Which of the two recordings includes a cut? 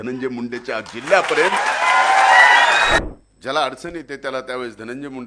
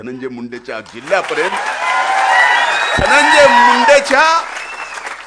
first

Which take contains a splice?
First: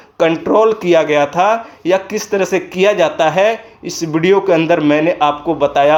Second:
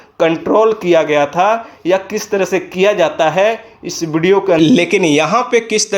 second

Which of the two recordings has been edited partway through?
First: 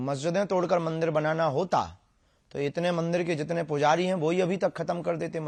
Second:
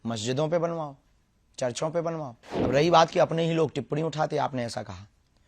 second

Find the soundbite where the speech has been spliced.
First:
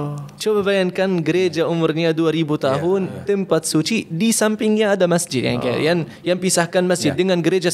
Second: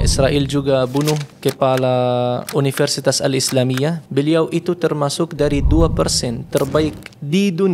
second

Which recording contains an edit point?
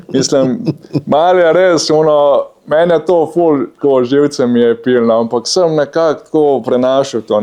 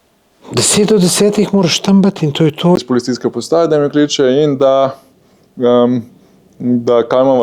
second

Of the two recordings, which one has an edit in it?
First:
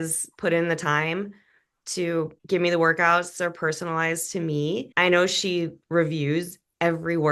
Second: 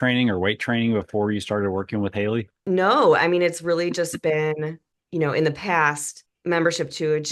second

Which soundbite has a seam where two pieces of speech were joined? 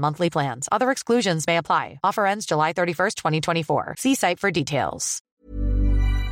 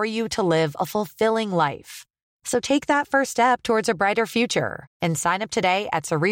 first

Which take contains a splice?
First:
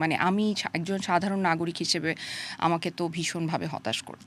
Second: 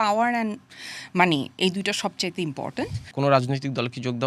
second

